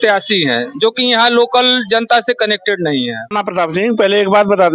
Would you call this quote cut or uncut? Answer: cut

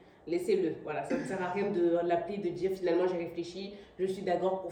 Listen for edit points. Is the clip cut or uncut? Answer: uncut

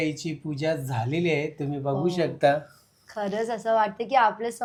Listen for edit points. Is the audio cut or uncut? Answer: uncut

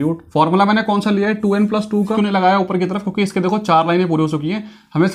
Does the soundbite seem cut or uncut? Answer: cut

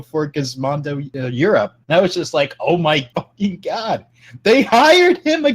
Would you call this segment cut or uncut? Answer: cut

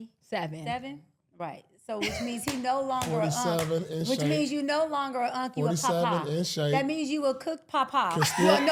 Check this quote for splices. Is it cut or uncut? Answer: uncut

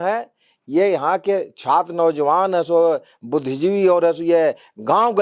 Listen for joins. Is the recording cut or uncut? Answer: uncut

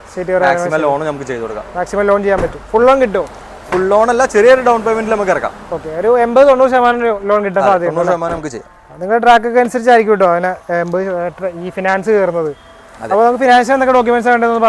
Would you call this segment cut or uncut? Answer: uncut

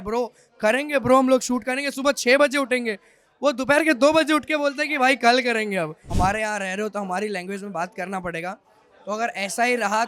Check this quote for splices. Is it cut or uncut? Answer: cut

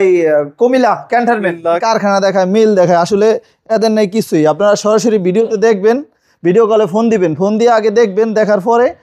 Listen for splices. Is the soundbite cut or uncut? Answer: cut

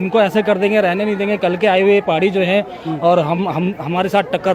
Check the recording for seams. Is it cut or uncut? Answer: uncut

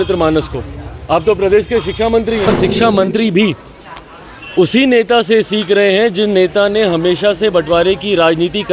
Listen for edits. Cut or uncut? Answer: cut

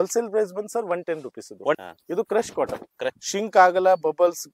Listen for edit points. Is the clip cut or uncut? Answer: cut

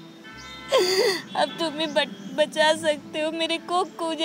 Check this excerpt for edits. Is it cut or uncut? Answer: uncut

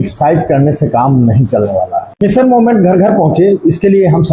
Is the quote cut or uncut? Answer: uncut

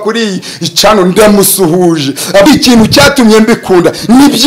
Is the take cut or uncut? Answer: cut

